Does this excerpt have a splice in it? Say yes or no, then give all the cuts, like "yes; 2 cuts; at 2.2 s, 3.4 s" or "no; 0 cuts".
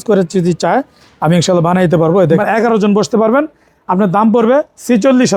yes; 1 cut; at 2.4 s